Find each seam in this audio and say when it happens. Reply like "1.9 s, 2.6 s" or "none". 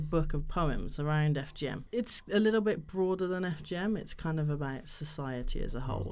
1.8 s